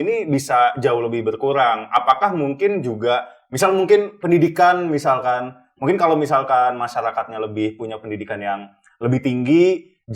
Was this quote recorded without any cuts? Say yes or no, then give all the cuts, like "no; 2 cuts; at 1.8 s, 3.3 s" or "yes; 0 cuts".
yes; 0 cuts